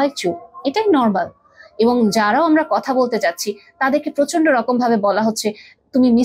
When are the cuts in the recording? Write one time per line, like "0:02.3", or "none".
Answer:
none